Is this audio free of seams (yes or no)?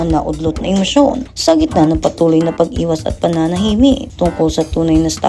no